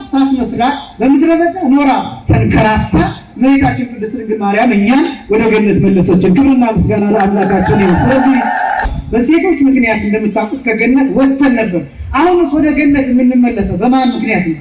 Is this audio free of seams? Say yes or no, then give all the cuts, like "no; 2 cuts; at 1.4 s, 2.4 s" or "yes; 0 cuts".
no; 1 cut; at 8.9 s